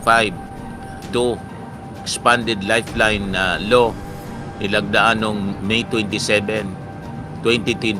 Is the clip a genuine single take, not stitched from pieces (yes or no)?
yes